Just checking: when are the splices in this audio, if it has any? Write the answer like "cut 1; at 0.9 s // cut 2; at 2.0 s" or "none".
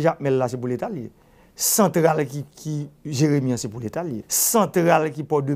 cut 1; at 4.3 s